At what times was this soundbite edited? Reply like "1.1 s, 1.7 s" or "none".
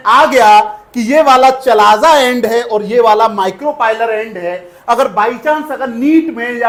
none